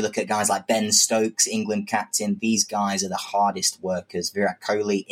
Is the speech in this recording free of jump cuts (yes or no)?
yes